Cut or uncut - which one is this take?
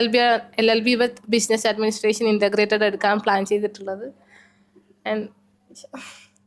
uncut